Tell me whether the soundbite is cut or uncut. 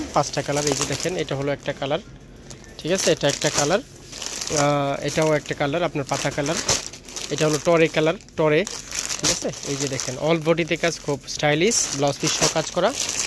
uncut